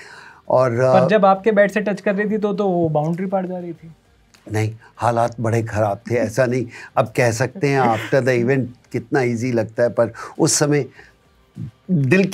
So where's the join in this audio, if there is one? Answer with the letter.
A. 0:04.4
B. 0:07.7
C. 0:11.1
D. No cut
D